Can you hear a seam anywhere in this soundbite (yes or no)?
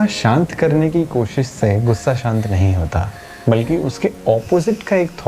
no